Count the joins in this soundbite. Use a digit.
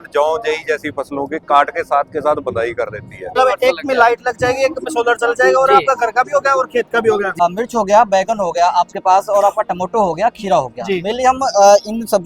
2